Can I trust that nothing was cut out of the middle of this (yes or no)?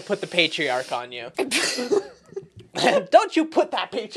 no